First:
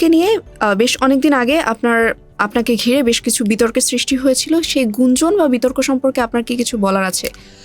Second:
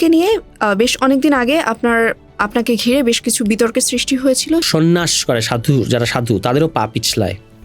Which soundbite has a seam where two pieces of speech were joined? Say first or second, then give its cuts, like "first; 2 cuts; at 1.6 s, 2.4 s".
second; 1 cut; at 4.7 s